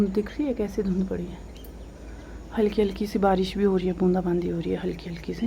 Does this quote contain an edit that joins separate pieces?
no; 0 cuts

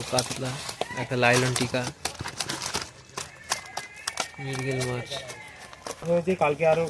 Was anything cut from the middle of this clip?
yes; 1 cut; at 6.0 s

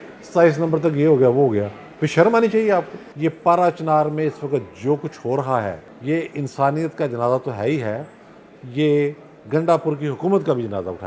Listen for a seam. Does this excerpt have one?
yes; 2 cuts; at 3.0 s, 5.9 s

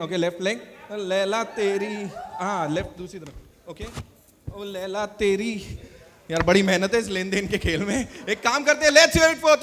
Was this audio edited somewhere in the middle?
no; 0 cuts

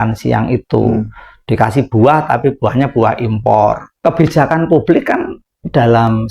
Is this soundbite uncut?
no; 1 cut; at 3.9 s

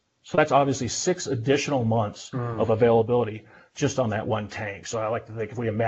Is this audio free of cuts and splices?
yes; 0 cuts

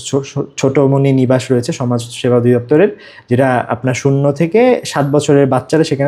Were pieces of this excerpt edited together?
no; 0 cuts

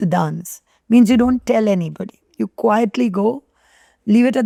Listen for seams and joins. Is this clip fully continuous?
yes; 0 cuts

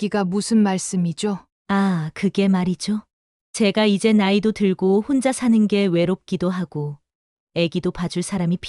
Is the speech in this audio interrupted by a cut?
yes; 1 cut; at 1.5 s

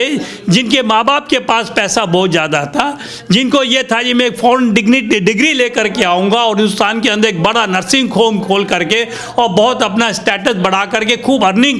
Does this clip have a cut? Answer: no; 0 cuts

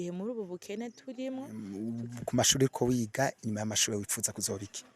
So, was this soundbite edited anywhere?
yes; 1 cut; at 1.6 s

